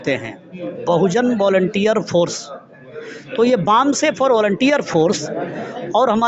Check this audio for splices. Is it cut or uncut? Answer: uncut